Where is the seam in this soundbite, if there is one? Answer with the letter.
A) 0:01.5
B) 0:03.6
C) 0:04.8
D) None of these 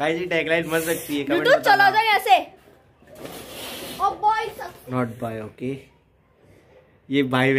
C